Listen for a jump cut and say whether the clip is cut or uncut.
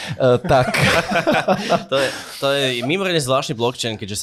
uncut